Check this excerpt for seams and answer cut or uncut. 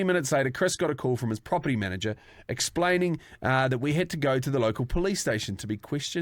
uncut